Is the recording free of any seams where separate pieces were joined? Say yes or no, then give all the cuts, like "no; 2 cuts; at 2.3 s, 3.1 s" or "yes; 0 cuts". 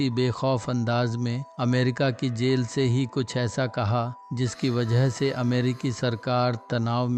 yes; 0 cuts